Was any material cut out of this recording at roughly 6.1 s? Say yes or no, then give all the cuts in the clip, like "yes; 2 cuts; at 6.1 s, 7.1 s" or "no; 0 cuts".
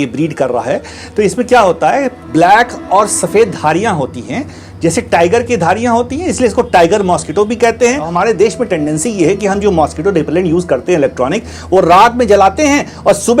no; 1 cut; at 8.1 s